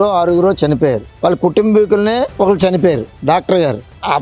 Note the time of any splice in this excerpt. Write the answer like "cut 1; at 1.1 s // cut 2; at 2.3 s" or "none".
cut 1; at 1.1 s // cut 2; at 2.3 s